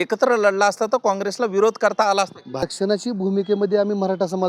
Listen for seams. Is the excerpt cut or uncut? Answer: cut